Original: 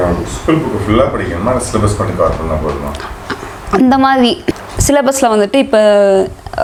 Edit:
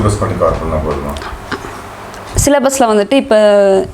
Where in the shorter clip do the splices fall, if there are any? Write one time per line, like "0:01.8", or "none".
0:01.9

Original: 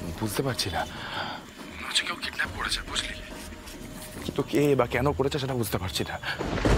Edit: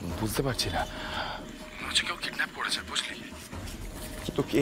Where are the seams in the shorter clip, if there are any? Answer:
none

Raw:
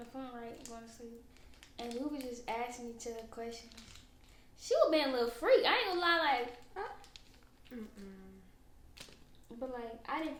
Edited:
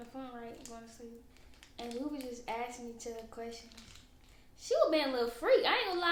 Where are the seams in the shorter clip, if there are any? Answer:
none

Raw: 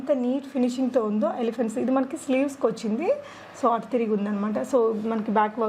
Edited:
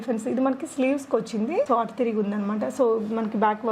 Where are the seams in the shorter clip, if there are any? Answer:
0:01.7

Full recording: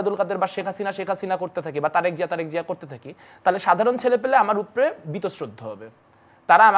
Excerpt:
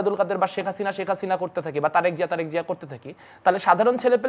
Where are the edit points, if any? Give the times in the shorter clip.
none

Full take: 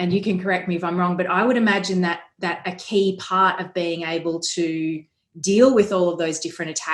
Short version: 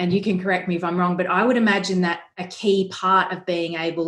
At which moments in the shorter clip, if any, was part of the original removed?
0:02.3

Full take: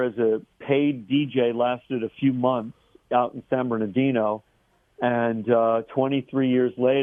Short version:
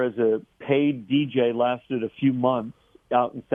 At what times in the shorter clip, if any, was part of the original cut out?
none

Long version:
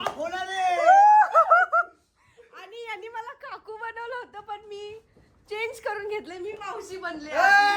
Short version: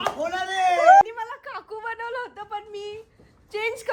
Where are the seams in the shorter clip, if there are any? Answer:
0:01.0

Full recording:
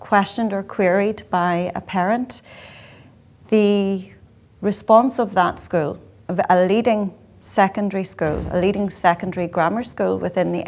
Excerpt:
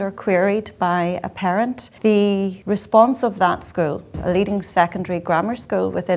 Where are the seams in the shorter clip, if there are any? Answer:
0:01.8
0:02.6
0:04.1

